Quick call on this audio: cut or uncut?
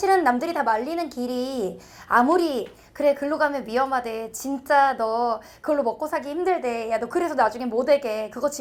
uncut